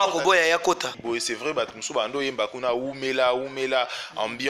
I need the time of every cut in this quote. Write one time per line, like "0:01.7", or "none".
0:00.9